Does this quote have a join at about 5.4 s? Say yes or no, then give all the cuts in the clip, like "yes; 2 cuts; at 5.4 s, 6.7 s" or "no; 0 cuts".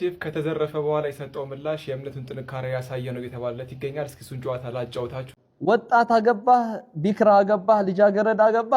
yes; 1 cut; at 5.4 s